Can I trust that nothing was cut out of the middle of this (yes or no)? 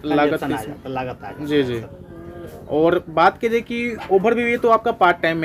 yes